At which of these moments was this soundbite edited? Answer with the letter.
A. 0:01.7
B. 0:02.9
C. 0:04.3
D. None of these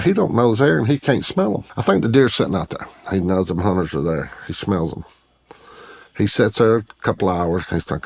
A